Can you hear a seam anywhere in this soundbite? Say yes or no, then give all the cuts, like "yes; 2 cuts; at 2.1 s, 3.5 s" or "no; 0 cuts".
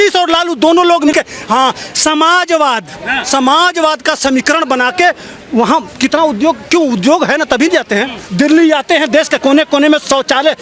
yes; 2 cuts; at 1.1 s, 8.2 s